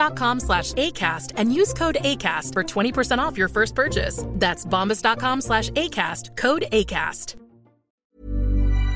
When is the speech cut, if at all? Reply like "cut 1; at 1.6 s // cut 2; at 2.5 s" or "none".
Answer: cut 1; at 8.0 s